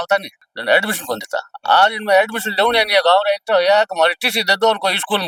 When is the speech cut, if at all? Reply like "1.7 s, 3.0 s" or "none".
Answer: none